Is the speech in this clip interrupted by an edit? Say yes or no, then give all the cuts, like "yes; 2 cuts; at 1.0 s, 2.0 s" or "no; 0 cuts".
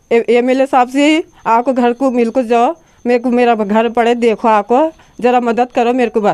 no; 0 cuts